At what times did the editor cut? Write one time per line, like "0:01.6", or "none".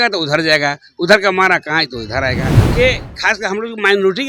0:02.6